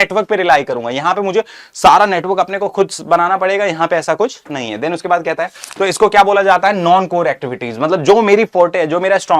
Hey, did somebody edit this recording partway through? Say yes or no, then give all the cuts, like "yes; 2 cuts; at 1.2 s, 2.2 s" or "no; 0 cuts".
yes; 1 cut; at 5.6 s